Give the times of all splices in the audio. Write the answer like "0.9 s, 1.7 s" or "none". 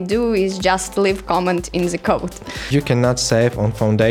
2.7 s